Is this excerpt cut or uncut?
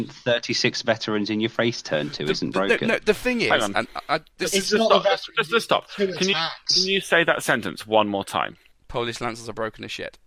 uncut